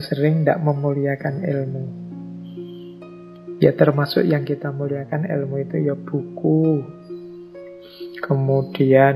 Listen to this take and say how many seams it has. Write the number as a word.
two